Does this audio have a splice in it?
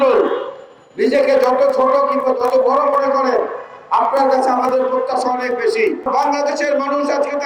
yes; 1 cut; at 6.1 s

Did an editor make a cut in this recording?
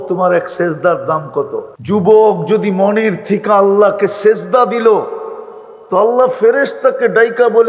yes; 1 cut; at 1.7 s

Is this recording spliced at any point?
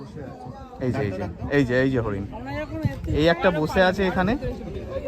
no; 0 cuts

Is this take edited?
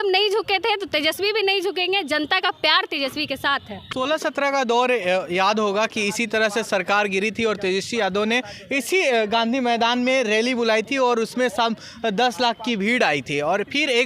yes; 1 cut; at 3.9 s

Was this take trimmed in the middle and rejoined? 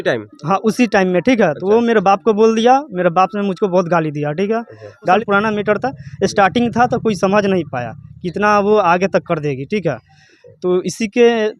yes; 1 cut; at 5.2 s

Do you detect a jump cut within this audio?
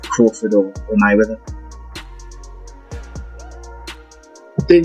no; 0 cuts

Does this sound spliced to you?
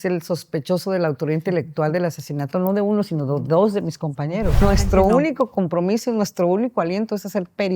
yes; 1 cut; at 4.6 s

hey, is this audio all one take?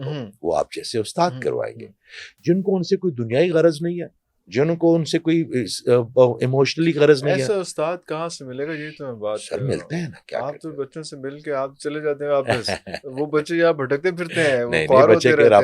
yes; 0 cuts

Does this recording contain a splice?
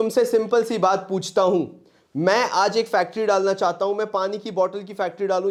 no; 0 cuts

